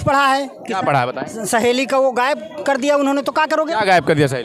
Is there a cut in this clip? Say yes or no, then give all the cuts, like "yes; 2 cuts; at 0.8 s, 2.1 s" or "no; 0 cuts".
no; 0 cuts